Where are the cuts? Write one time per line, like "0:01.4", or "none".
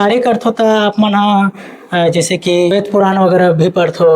0:02.7